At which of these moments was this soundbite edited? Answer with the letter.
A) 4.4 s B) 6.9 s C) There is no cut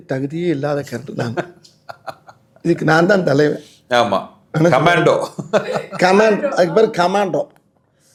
C